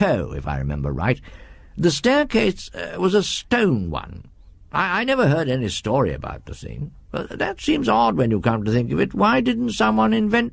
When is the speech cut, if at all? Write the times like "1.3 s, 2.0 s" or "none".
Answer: 2.1 s